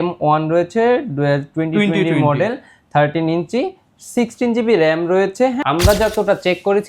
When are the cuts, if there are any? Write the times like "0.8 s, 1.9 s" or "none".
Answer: 5.6 s